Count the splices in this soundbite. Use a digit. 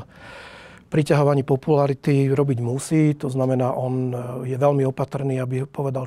0